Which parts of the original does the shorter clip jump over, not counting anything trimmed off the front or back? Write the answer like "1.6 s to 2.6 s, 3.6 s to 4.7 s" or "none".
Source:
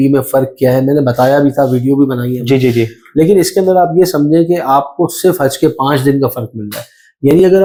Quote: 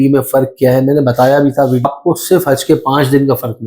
1.9 s to 4.8 s